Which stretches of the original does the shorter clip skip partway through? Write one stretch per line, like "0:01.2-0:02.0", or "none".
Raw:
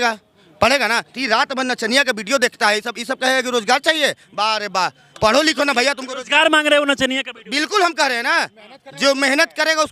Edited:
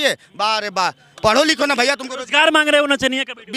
none

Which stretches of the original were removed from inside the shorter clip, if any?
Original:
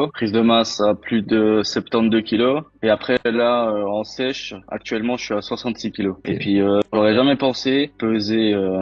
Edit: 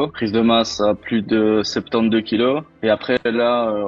none

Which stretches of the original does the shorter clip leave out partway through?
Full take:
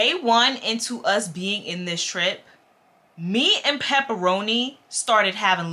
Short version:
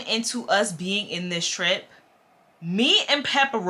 none

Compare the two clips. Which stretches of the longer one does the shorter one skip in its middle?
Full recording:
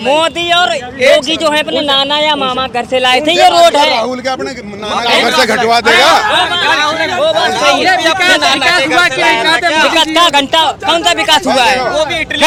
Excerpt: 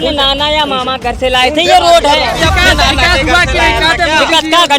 0:04.0-0:08.0

